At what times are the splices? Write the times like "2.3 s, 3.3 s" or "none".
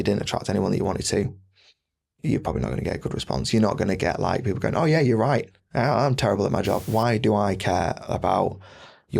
6.8 s